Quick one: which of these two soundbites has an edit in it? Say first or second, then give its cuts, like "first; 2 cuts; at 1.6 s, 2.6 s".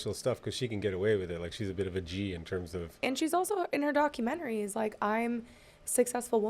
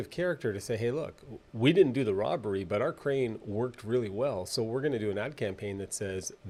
first; 1 cut; at 3.1 s